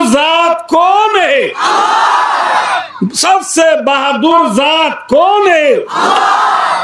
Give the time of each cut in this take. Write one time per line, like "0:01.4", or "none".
none